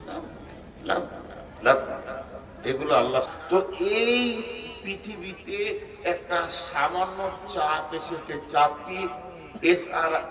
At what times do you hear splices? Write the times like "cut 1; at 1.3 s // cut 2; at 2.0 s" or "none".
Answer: cut 1; at 3.3 s